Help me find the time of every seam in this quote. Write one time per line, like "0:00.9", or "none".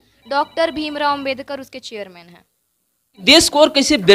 0:03.2